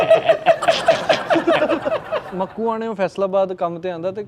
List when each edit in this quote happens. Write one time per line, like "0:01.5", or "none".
0:02.2